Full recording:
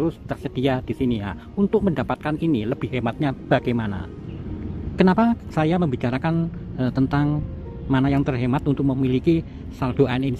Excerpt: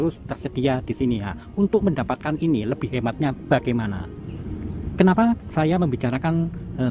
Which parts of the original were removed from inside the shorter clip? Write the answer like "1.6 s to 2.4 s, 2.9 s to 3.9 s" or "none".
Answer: none

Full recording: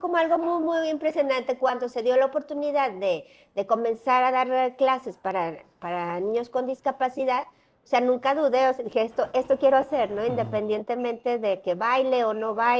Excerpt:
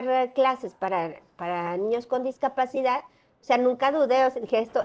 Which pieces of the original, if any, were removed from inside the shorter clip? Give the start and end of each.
none

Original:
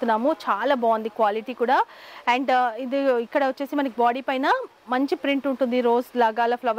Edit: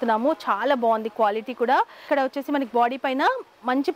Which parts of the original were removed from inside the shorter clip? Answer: 2.0 s to 3.3 s

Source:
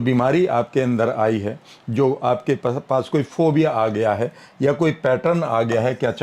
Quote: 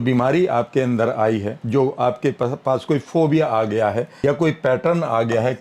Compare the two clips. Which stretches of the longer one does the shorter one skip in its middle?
1.6 s to 1.8 s, 4.4 s to 4.5 s

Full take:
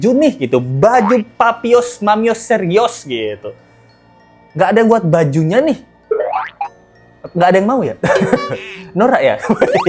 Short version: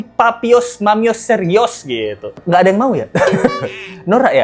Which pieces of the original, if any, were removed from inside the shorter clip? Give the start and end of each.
3.5 s to 7.2 s

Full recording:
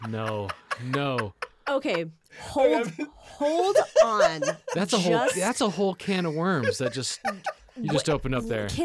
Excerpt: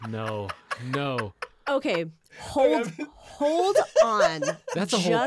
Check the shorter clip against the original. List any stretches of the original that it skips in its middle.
none

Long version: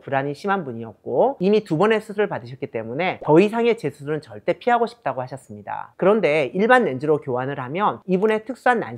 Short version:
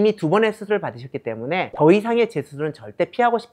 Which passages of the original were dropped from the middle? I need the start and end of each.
none

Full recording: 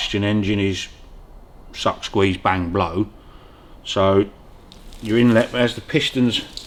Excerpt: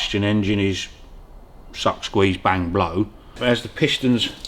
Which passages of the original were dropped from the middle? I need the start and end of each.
3.4 s to 5.5 s

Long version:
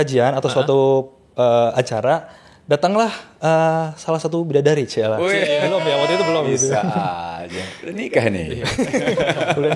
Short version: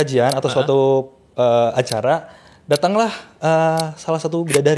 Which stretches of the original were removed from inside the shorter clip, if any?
none

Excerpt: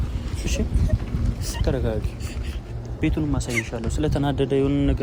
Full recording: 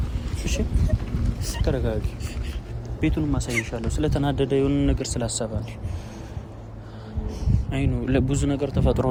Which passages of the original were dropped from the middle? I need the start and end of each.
none

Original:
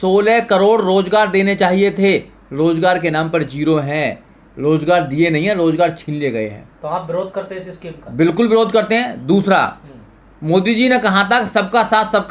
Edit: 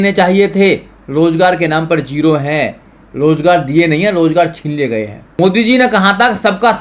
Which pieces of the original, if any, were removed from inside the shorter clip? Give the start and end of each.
6.6 s to 10.3 s

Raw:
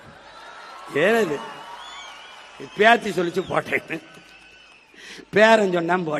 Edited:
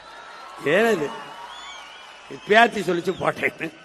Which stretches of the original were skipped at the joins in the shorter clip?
none

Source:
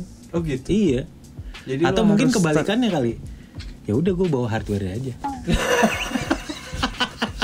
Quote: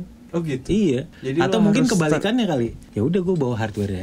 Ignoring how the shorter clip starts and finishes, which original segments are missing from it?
1.2 s to 1.6 s, 3.3 s to 3.7 s

